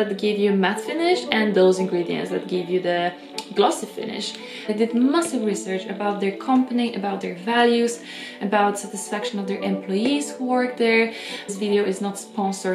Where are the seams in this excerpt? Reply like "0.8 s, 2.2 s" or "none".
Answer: 4.7 s, 11.5 s

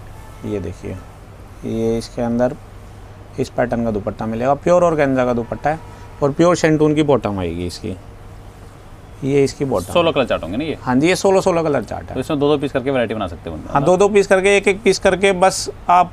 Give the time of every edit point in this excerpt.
none

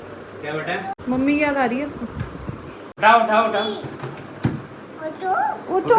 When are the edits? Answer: 0.9 s, 2.8 s

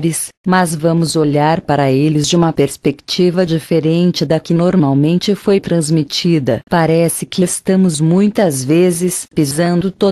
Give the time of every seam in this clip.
6.2 s

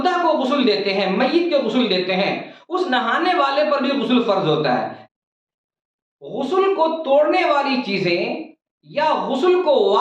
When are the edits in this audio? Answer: 5.0 s

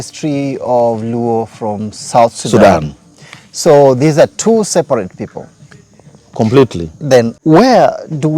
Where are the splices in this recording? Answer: 7.3 s

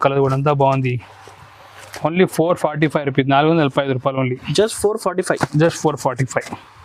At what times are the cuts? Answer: none

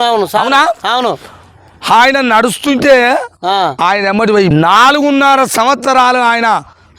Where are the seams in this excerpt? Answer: 4.5 s

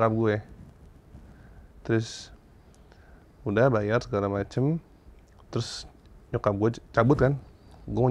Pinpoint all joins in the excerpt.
none

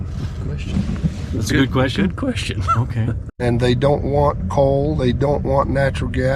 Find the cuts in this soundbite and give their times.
3.4 s

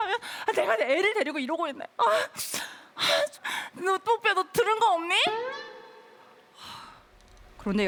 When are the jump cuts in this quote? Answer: none

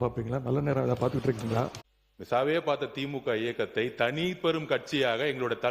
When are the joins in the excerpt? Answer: 1.8 s

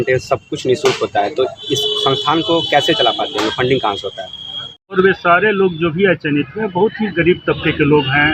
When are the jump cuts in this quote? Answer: 4.9 s

